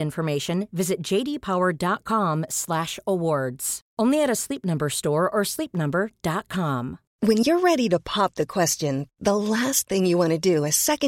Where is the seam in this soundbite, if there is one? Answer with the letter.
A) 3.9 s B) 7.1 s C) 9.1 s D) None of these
B